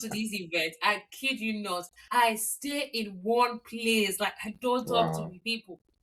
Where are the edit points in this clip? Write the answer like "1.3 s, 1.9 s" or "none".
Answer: 1.9 s